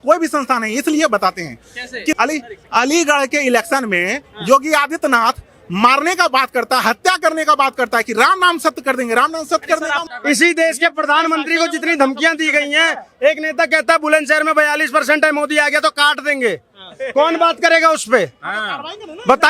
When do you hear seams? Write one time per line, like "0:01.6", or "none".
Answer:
0:02.2
0:10.0